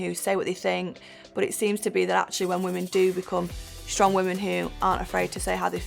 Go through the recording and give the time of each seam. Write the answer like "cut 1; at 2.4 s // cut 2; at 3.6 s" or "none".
none